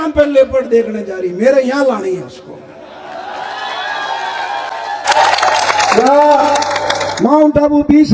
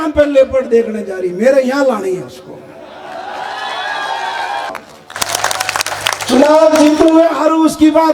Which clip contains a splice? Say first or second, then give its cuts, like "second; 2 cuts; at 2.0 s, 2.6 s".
second; 1 cut; at 4.7 s